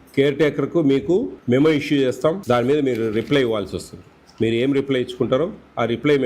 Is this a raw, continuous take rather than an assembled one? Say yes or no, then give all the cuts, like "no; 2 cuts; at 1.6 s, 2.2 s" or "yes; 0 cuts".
no; 2 cuts; at 1.4 s, 2.4 s